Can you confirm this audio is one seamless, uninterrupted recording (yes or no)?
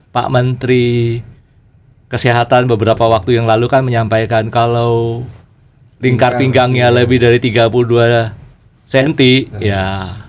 yes